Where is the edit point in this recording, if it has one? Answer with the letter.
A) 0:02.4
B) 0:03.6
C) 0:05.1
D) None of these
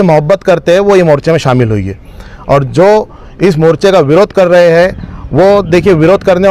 D